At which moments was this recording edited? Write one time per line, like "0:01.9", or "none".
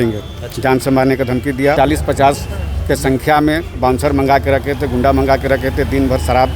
0:01.8